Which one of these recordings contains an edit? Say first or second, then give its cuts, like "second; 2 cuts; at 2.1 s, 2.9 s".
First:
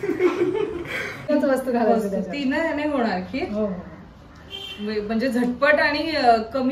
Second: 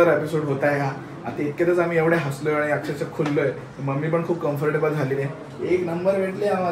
first; 1 cut; at 1.2 s